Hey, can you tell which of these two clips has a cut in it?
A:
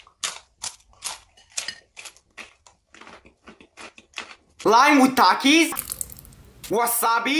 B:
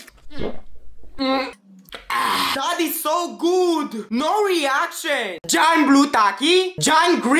B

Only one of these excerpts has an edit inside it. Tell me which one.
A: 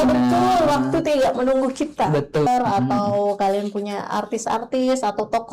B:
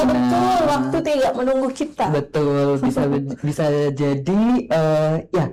A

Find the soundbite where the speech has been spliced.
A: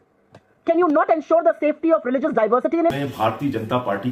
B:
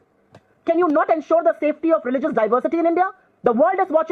A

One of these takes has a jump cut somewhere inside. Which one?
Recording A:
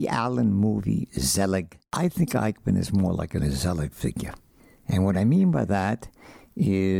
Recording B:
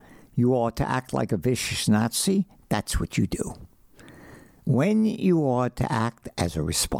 A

